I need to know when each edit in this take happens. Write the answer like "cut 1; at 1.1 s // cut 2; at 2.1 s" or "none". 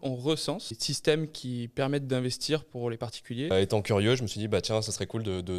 cut 1; at 0.9 s // cut 2; at 3.5 s